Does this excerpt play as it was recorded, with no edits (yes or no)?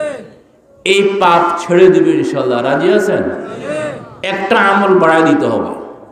no